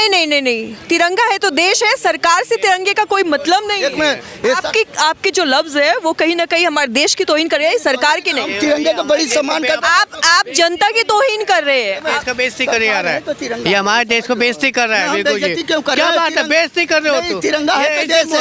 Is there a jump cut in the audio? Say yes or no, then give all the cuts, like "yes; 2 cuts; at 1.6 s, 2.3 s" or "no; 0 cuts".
no; 0 cuts